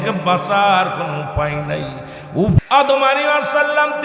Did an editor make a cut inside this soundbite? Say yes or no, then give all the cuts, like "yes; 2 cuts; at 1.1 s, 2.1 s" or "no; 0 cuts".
yes; 1 cut; at 2.6 s